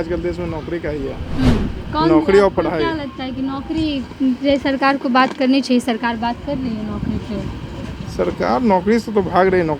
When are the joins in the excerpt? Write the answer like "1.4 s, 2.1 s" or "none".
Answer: none